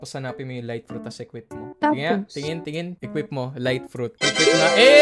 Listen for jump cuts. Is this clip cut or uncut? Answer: cut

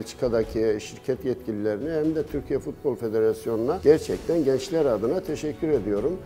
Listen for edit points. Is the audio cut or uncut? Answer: uncut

